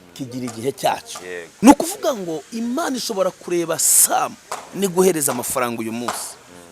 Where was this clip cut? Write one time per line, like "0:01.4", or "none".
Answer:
0:01.5